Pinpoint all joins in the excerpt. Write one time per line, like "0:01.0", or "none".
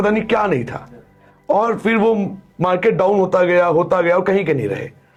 none